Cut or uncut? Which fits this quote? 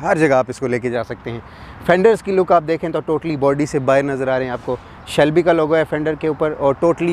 uncut